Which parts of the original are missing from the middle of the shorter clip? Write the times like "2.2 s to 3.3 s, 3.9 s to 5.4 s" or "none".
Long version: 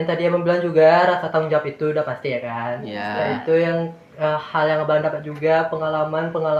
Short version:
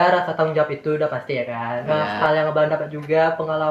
2.7 s to 4.1 s

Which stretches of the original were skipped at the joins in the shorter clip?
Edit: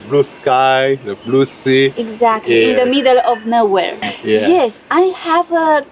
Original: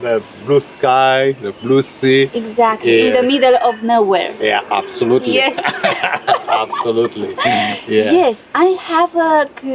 4.4 s to 7.6 s

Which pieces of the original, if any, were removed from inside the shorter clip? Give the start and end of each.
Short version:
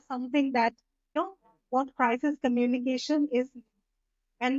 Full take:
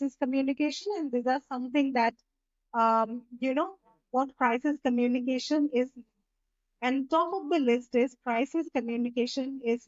2.5 s to 3.6 s

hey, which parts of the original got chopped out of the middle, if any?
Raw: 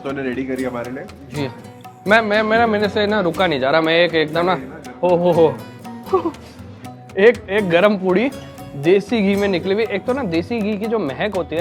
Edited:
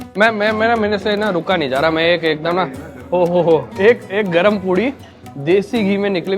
5.6 s to 7.1 s

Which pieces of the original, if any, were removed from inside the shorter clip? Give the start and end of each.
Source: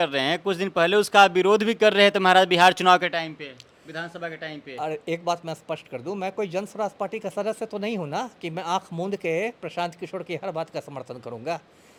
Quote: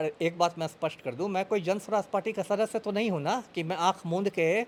none

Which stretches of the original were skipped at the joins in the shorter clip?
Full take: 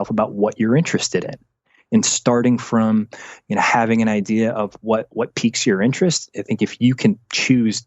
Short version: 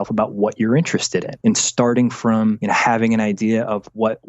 1.3 s to 1.8 s, 3.1 s to 3.5 s

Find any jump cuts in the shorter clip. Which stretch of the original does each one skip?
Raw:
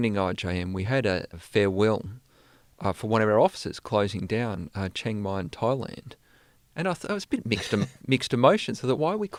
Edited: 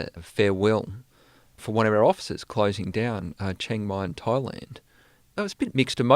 2.8 s to 3.0 s, 6.8 s to 7.8 s

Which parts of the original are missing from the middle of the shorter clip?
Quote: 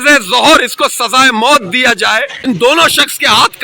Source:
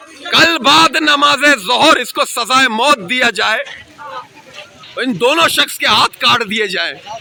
3.7 s to 5.0 s

